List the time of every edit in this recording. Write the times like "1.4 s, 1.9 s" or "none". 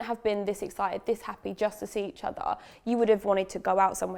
none

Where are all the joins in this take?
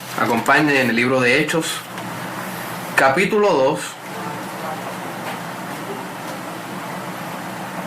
1.1 s

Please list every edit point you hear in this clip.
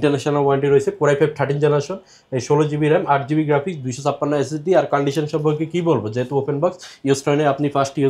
none

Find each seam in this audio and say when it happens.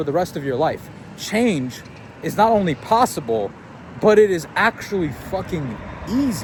none

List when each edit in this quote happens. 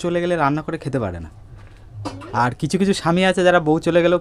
none

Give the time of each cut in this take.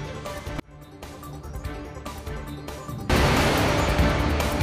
none

